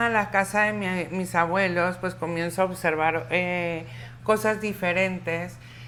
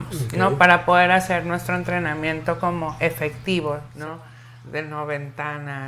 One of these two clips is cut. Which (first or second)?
second